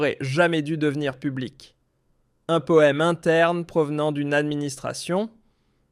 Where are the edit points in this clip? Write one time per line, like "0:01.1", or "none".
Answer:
0:00.9